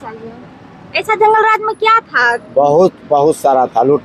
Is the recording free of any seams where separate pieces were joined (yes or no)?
yes